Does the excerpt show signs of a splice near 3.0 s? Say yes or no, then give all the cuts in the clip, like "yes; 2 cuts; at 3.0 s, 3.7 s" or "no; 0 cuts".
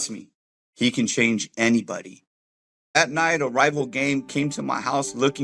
yes; 1 cut; at 3.0 s